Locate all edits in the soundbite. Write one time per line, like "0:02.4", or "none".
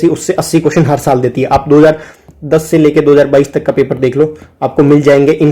none